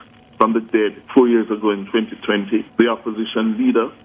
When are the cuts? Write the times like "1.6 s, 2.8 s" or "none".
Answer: 1.0 s, 2.7 s